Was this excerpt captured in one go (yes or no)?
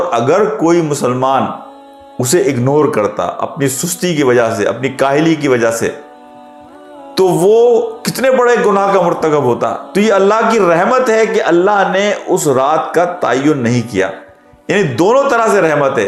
yes